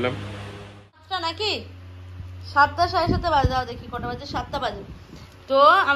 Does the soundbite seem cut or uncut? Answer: cut